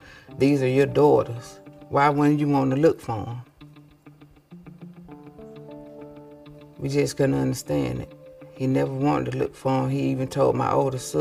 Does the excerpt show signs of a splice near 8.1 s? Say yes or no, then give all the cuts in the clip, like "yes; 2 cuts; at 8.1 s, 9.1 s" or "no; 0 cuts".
no; 1 cut; at 3.5 s